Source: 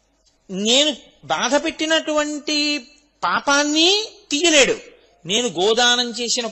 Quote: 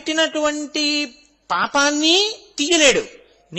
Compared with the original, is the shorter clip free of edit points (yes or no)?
yes